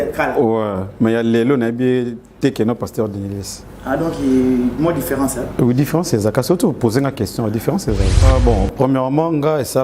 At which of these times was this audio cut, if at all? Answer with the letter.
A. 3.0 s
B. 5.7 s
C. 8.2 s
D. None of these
C